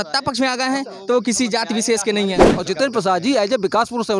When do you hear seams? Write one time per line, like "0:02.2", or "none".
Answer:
0:02.5